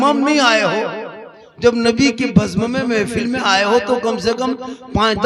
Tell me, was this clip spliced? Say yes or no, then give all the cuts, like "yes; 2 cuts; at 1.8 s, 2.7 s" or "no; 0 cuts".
no; 0 cuts